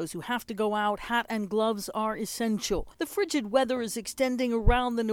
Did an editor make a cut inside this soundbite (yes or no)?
yes